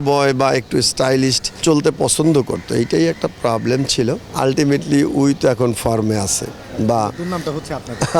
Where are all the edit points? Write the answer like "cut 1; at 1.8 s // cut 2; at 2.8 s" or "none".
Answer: cut 1; at 1.5 s // cut 2; at 4.3 s